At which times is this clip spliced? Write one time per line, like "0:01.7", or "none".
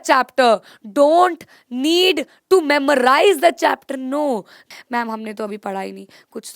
0:04.6